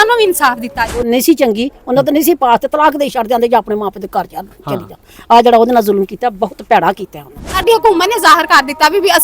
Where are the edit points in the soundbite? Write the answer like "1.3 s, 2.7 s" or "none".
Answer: 1.0 s, 7.6 s

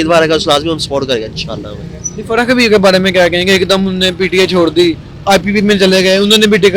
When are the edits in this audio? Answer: none

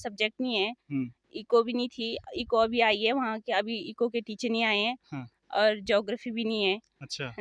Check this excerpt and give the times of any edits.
none

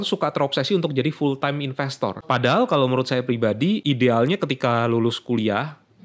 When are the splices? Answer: 2.2 s, 3.8 s

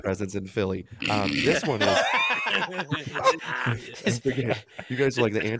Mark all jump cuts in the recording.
none

